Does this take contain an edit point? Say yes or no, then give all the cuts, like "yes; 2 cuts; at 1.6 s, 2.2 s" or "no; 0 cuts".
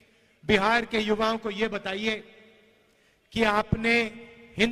no; 0 cuts